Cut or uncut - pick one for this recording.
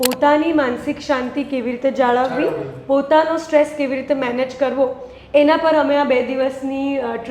uncut